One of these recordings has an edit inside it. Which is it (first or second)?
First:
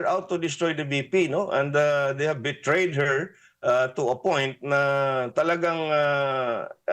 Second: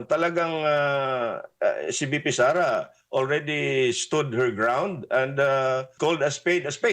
second